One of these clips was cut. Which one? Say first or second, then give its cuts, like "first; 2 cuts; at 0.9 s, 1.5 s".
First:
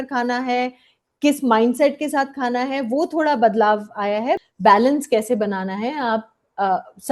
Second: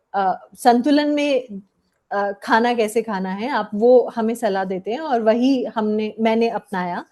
first; 1 cut; at 4.4 s